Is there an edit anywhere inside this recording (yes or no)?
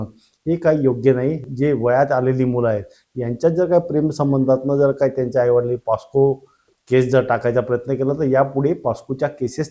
yes